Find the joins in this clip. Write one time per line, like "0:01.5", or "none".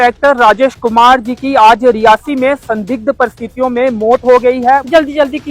0:04.6